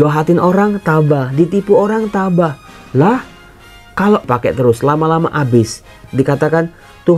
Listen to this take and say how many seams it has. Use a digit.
2